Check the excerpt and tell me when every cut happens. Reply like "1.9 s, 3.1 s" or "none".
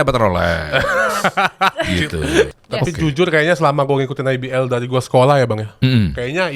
2.6 s